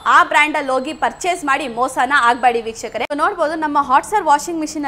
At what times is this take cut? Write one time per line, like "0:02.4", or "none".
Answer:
0:03.1